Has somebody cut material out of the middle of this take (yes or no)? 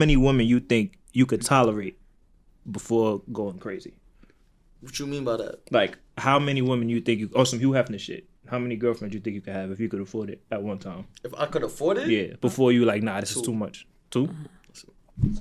no